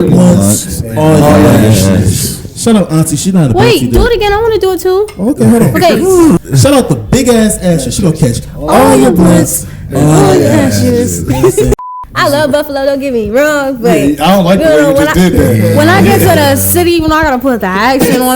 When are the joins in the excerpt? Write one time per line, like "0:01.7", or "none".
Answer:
0:06.4
0:11.7